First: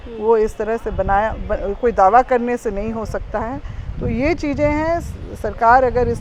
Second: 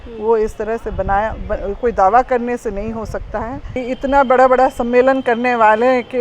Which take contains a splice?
second; 1 cut; at 3.8 s

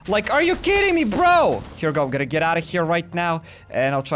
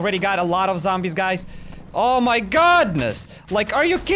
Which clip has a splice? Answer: first; 1 cut; at 1.7 s

